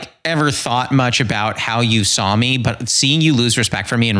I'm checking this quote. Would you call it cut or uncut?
uncut